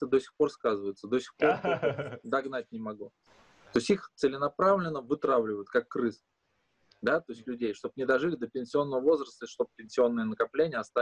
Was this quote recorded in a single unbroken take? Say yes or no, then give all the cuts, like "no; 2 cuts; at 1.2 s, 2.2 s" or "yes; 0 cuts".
no; 1 cut; at 3.2 s